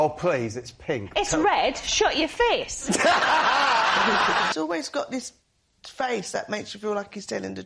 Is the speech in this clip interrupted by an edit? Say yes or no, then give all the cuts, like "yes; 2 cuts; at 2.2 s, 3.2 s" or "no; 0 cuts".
yes; 1 cut; at 4.5 s